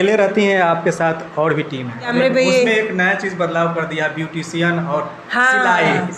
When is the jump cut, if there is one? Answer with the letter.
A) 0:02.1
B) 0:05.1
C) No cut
A